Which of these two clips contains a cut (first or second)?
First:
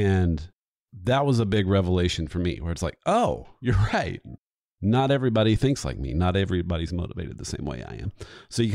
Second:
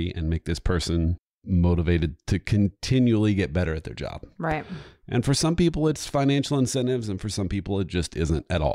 second